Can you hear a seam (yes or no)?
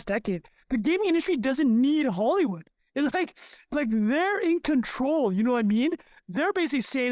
no